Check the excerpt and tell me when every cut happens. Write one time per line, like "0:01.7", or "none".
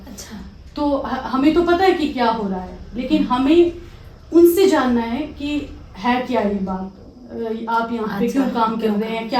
none